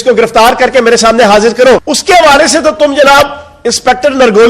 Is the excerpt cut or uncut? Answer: cut